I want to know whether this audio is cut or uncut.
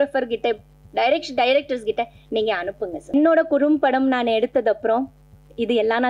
cut